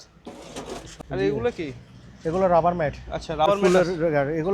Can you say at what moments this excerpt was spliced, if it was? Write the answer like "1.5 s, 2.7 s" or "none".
0.9 s, 3.5 s